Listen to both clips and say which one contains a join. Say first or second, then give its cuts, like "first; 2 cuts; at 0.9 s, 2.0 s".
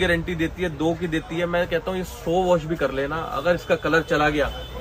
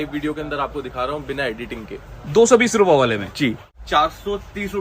second; 1 cut; at 3.7 s